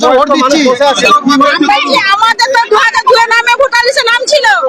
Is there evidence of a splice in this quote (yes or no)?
yes